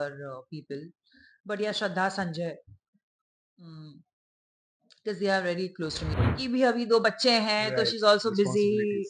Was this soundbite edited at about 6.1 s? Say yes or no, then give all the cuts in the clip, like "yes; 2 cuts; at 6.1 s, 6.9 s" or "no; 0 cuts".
yes; 1 cut; at 6.1 s